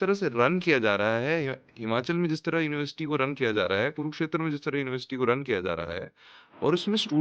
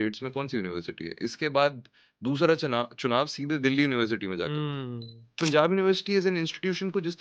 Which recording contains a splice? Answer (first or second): second